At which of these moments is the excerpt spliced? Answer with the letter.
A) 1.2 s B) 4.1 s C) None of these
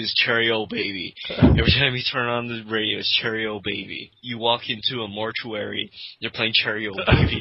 B